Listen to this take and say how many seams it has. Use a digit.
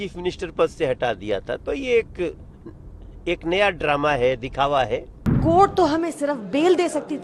1